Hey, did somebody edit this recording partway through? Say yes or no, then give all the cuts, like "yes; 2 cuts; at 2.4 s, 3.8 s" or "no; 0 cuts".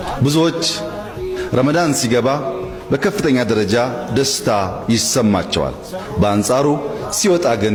no; 0 cuts